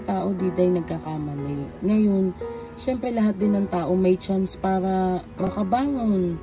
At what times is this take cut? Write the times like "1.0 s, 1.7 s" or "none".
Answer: 5.5 s